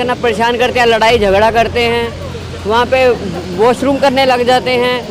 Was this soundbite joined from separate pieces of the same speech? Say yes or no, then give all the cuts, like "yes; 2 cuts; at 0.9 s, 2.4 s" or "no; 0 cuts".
no; 0 cuts